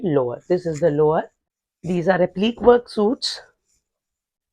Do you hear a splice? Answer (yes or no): yes